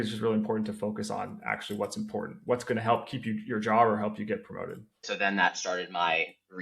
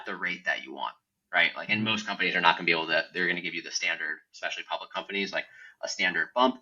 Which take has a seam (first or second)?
first